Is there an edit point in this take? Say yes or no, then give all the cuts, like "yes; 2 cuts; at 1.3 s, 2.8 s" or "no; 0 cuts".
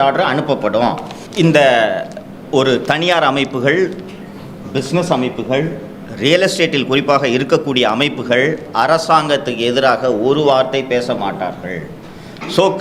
yes; 1 cut; at 1.1 s